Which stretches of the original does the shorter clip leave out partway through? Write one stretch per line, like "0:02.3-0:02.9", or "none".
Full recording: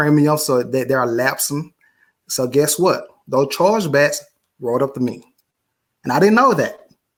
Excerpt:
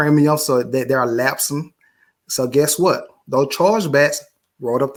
none